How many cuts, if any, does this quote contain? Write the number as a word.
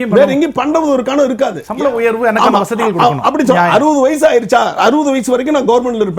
one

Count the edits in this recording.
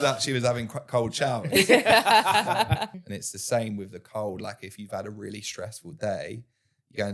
one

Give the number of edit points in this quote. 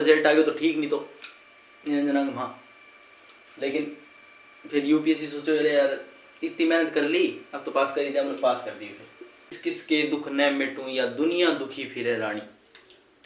one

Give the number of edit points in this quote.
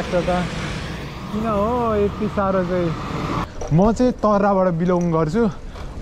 one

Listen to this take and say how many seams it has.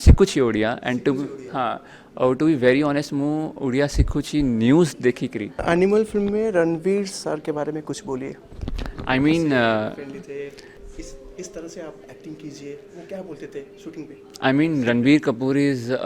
one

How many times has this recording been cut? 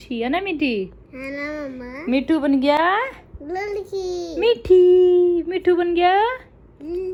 zero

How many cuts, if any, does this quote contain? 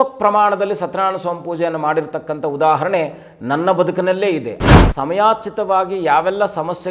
one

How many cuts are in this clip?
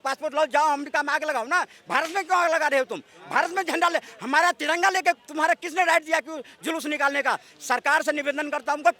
zero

